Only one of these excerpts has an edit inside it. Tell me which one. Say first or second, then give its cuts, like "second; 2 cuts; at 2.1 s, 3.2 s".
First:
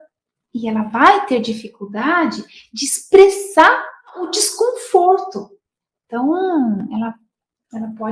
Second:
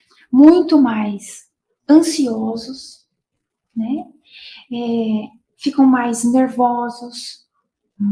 first; 1 cut; at 4.4 s